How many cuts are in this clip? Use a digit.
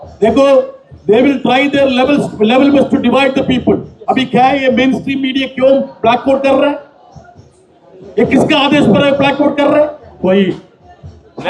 1